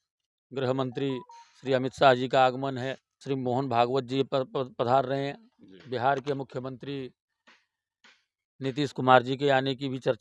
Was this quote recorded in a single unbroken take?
no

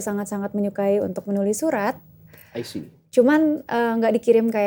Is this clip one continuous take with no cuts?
yes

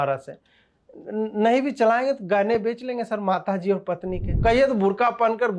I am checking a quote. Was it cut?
yes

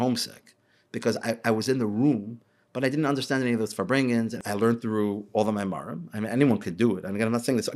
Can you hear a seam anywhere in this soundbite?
yes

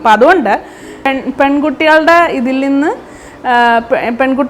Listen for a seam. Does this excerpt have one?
yes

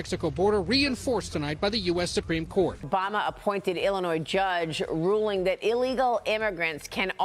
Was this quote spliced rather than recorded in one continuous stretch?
yes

